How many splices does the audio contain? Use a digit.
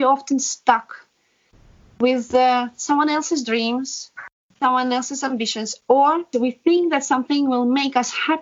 2